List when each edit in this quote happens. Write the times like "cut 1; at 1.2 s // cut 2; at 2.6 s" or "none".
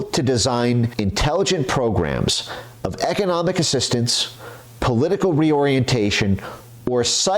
cut 1; at 0.9 s

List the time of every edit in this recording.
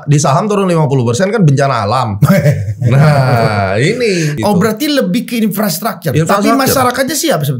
cut 1; at 4.3 s

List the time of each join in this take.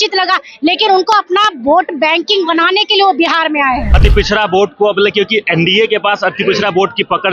cut 1; at 3.9 s

